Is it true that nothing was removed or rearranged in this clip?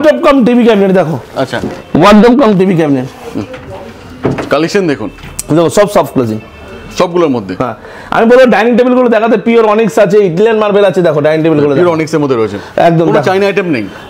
yes; 0 cuts

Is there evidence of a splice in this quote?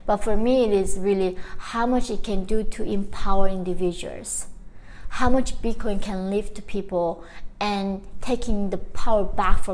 no; 0 cuts

